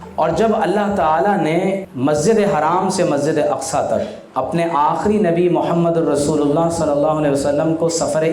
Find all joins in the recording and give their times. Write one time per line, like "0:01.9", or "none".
0:01.9
0:04.2